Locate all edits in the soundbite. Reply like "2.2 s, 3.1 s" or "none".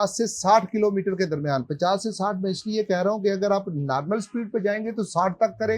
none